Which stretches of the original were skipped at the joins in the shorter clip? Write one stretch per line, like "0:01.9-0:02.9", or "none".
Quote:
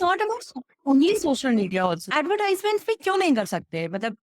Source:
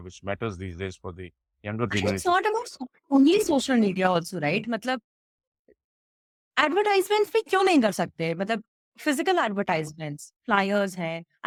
0:04.3-0:06.5